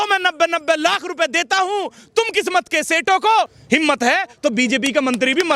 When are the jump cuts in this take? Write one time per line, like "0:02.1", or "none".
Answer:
0:03.6

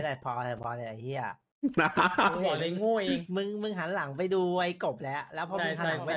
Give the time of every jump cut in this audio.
0:01.4

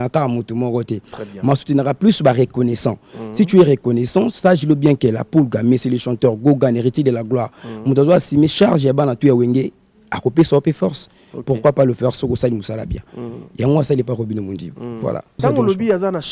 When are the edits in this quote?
0:15.4

